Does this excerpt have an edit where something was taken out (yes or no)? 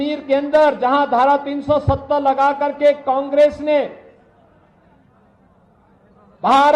no